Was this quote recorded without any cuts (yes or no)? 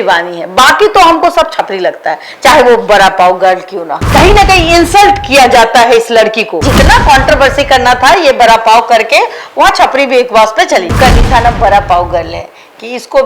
no